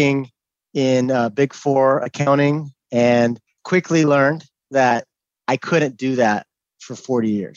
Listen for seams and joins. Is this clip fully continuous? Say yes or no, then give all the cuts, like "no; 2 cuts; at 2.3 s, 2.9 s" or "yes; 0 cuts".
yes; 0 cuts